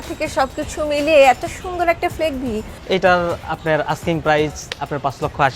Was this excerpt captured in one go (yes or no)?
no